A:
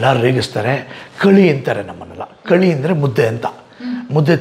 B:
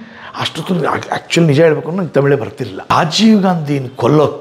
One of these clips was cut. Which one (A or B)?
B